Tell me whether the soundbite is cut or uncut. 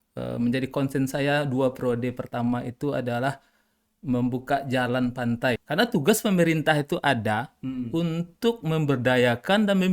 cut